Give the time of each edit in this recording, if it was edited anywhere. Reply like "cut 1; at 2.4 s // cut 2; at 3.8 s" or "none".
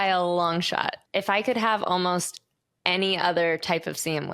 cut 1; at 1.0 s